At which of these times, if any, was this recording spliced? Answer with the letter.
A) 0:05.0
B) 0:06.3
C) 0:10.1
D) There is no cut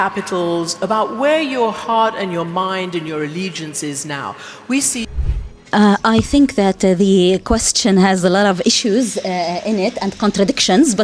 A